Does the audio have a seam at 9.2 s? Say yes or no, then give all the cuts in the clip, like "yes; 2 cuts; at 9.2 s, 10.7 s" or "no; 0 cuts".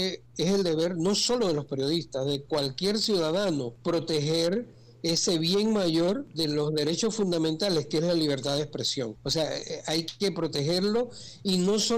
yes; 3 cuts; at 3.7 s, 6.3 s, 9.2 s